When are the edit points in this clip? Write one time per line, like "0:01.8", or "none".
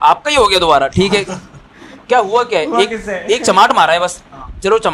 none